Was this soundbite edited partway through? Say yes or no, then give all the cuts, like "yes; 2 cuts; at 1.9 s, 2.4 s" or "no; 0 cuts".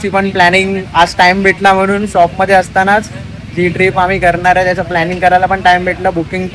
no; 0 cuts